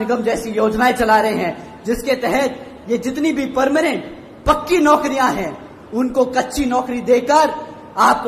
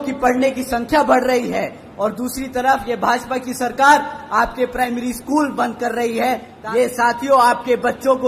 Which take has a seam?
second; 1 cut; at 6.5 s

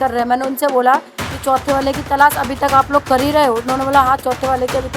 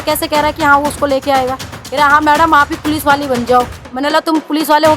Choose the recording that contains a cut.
second; 1 cut; at 1.7 s

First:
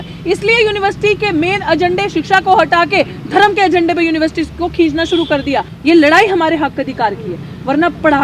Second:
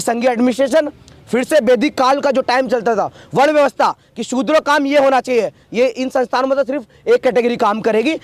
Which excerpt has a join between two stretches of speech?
first; 1 cut; at 5.7 s

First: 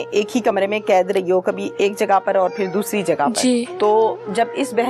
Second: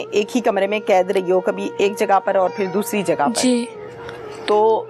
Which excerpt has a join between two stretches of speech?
first; 1 cut; at 3.7 s

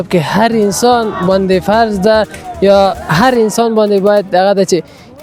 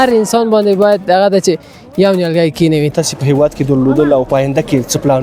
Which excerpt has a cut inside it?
second; 1 cut; at 2.9 s

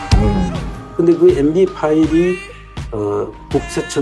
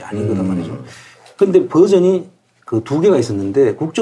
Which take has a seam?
second; 1 cut; at 2.9 s

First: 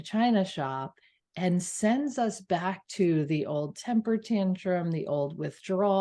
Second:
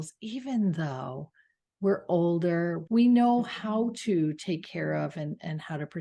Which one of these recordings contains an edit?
second; 1 cut; at 2.8 s

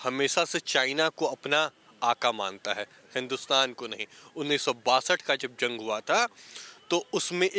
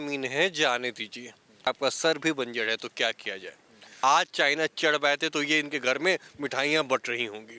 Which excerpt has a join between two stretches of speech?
second; 2 cuts; at 1.7 s, 4.0 s

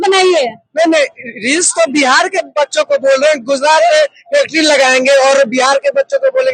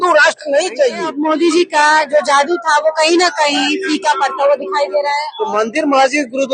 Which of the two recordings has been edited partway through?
second; 2 cuts; at 1.2 s, 5.2 s

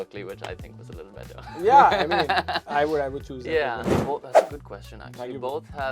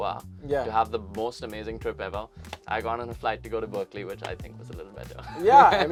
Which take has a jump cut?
first; 1 cut; at 3.9 s

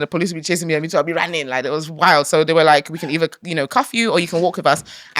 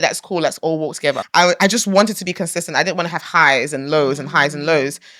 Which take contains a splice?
second; 1 cut; at 1.2 s

